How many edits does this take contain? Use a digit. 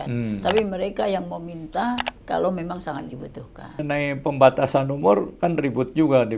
1